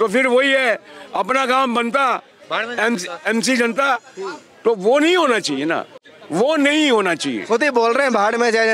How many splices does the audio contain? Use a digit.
0